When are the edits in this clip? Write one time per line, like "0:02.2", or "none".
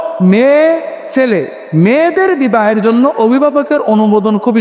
none